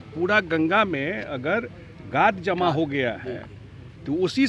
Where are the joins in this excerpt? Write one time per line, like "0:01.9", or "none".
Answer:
none